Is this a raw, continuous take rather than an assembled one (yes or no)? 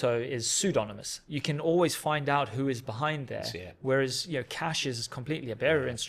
yes